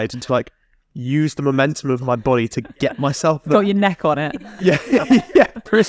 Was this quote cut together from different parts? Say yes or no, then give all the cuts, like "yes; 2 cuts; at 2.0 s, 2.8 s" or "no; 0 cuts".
no; 0 cuts